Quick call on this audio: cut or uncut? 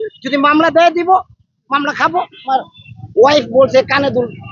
cut